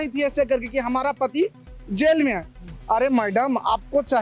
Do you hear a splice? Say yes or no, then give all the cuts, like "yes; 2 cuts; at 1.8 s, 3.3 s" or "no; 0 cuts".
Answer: no; 0 cuts